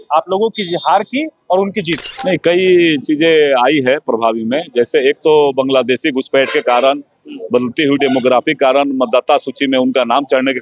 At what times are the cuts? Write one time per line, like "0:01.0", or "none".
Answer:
0:02.1